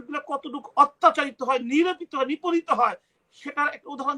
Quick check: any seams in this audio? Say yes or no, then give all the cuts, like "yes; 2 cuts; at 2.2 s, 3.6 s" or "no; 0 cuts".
no; 0 cuts